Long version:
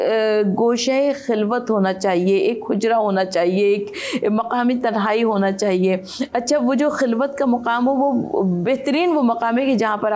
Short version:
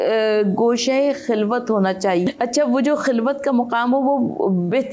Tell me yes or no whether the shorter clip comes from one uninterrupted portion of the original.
no